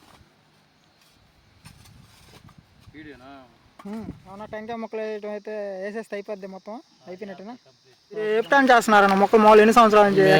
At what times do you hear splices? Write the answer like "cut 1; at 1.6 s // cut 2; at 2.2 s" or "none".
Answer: cut 1; at 8.3 s